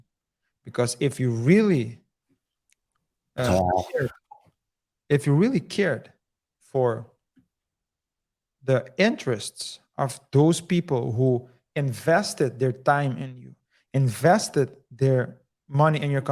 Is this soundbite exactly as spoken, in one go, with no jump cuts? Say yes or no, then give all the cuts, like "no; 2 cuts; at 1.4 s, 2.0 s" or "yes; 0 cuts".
yes; 0 cuts